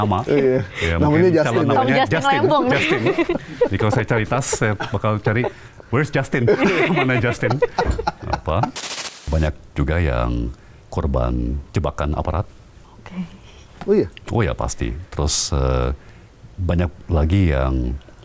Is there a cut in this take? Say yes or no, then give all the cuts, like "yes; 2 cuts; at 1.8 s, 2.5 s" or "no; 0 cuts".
yes; 1 cut; at 9.2 s